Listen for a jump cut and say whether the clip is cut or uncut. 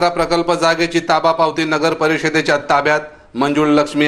uncut